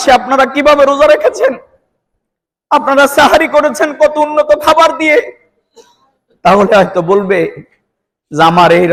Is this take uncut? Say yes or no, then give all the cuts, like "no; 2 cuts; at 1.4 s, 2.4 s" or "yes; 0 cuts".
yes; 0 cuts